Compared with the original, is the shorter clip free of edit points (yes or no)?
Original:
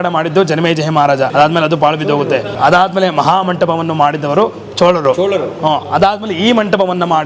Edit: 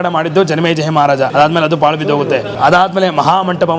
yes